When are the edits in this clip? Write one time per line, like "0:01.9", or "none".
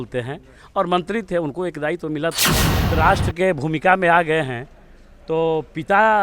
0:02.8